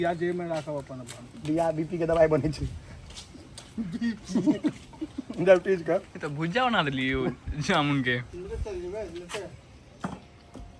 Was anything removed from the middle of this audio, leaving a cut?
no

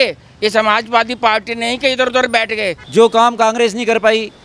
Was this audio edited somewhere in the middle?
yes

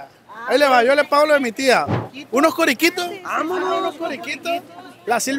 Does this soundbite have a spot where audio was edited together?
yes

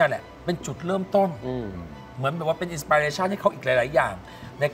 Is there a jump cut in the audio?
no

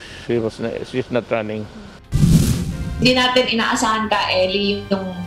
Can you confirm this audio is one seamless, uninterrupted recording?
no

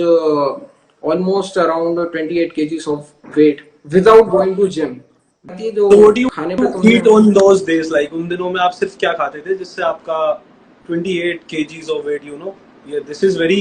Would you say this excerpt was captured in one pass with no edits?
no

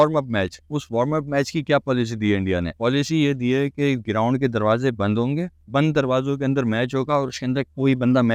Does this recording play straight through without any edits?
yes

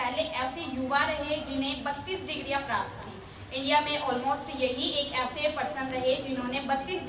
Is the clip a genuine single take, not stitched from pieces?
yes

